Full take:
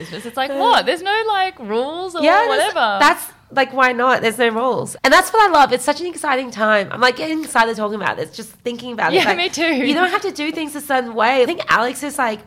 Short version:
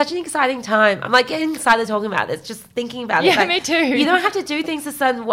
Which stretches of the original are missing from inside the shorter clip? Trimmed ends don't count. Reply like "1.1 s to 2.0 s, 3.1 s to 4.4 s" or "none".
none